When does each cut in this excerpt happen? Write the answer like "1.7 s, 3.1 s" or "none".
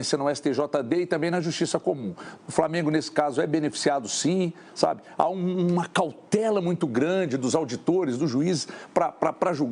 2.3 s